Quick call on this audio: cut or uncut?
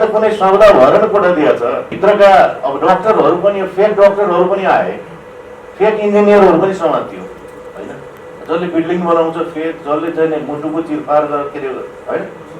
cut